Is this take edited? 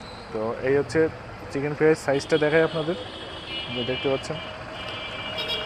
no; 0 cuts

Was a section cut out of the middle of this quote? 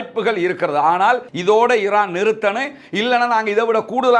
yes; 1 cut; at 1.3 s

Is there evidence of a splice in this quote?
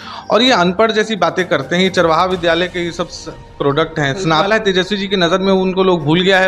yes; 1 cut; at 4.5 s

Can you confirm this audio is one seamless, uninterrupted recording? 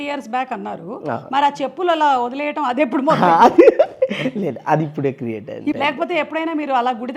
no; 1 cut; at 5.8 s

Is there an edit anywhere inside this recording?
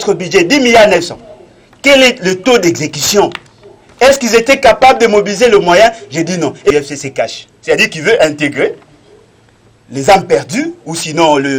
yes; 1 cut; at 6.7 s

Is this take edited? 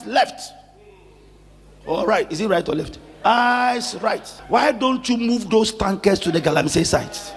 yes; 1 cut; at 4.3 s

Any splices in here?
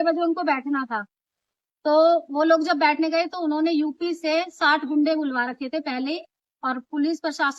no; 0 cuts

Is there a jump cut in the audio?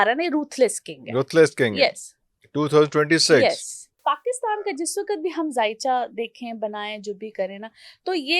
yes; 1 cut; at 3.9 s

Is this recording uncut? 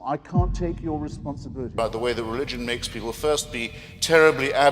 no; 1 cut; at 1.6 s

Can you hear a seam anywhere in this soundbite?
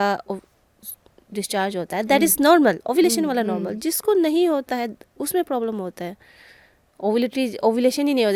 no; 0 cuts

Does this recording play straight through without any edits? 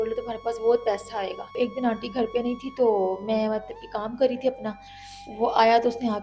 no; 1 cut; at 1.5 s

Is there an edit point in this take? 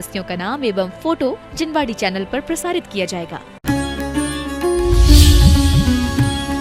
yes; 1 cut; at 3.5 s

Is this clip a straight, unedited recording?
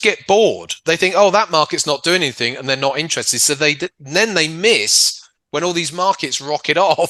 yes; 0 cuts

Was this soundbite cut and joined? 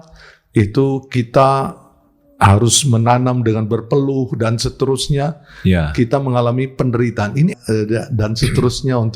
yes; 1 cut; at 7.5 s

